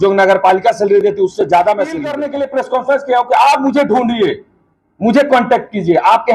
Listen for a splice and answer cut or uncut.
cut